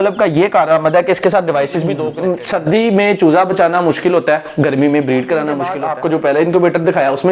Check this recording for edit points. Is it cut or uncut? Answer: cut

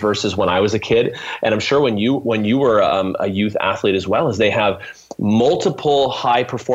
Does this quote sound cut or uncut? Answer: uncut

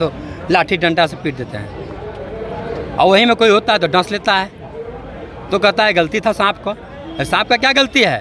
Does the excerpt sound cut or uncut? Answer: uncut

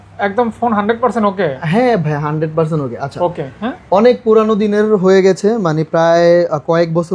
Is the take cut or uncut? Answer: uncut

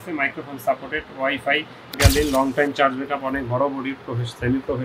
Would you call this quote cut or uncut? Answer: cut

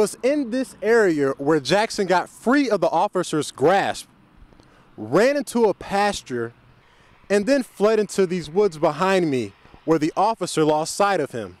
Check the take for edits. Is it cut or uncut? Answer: uncut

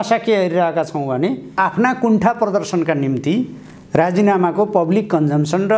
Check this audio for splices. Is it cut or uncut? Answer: cut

